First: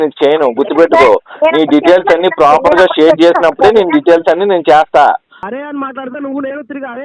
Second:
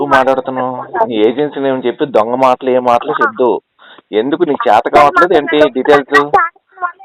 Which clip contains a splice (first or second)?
first